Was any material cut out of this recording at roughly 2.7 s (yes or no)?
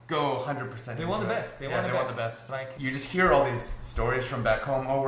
yes